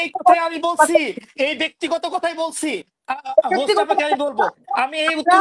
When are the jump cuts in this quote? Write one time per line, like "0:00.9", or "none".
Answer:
none